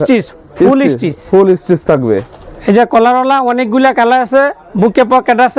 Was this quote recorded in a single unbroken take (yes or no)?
yes